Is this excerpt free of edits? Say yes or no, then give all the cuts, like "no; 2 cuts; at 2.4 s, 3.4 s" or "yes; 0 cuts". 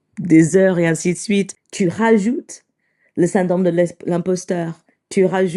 no; 1 cut; at 1.6 s